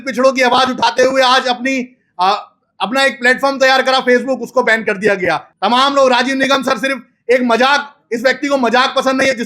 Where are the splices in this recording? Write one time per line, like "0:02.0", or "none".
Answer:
0:05.5